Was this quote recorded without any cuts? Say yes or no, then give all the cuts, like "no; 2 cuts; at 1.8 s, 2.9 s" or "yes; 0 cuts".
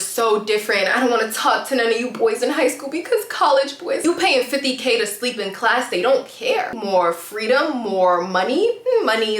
no; 2 cuts; at 4.0 s, 6.7 s